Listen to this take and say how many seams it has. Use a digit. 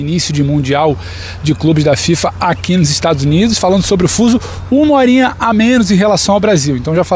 0